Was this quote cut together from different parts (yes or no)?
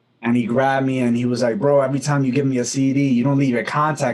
no